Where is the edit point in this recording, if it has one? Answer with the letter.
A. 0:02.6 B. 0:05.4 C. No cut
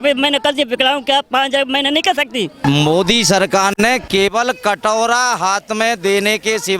A